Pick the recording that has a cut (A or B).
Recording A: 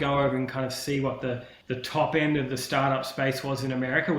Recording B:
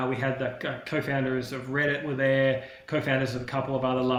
A